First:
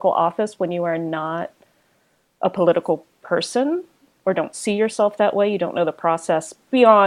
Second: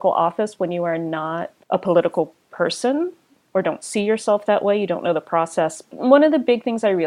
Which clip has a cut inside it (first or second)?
second